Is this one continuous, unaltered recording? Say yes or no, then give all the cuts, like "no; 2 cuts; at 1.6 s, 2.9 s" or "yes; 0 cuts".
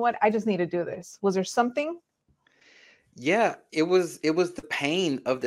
yes; 0 cuts